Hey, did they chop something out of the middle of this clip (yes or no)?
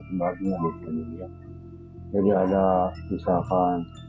no